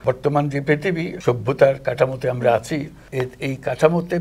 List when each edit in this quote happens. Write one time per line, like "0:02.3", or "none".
0:01.1
0:03.0